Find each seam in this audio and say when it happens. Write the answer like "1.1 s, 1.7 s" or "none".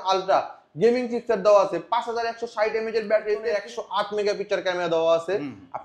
3.5 s